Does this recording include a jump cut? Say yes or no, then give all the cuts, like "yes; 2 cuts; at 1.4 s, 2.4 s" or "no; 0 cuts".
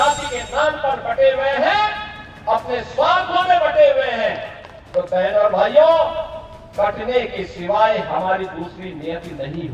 no; 0 cuts